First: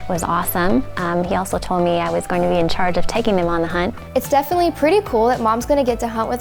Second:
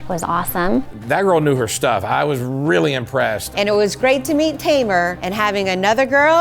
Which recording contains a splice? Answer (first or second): second